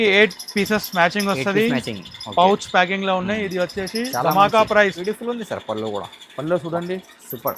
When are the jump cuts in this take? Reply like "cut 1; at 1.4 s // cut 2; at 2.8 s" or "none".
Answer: cut 1; at 5.0 s